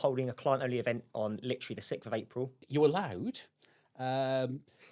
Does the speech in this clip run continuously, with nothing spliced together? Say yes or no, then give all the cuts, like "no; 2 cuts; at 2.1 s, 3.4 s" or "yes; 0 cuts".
no; 1 cut; at 2.6 s